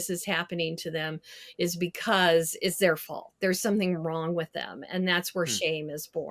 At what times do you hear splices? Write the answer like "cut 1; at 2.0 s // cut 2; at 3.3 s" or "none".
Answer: none